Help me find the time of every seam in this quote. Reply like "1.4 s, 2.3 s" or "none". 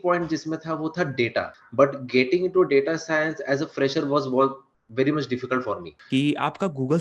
1.6 s, 5.9 s

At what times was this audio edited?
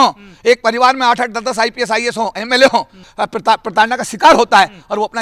3.0 s

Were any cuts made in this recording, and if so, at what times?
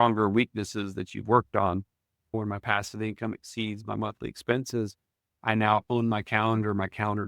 2.3 s

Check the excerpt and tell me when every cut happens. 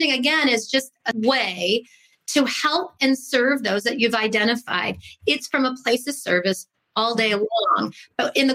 1.1 s

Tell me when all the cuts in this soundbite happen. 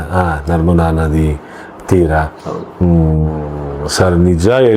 none

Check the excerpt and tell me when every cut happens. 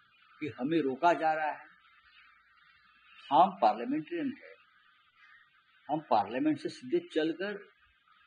none

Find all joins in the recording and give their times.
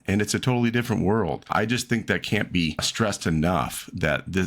1.5 s, 2.9 s

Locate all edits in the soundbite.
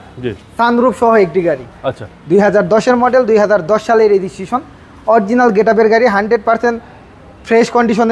none

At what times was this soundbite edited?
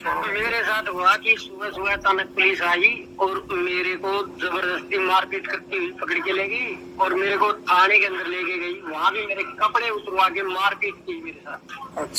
none

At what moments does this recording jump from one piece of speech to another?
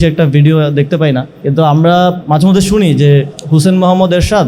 1.3 s, 2.2 s, 3.4 s

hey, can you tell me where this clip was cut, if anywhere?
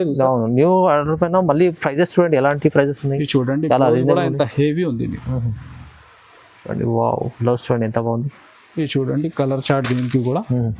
none

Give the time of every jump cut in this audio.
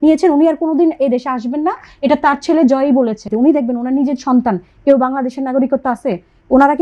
3.3 s

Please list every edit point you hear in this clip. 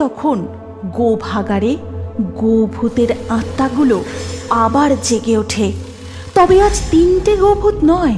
none

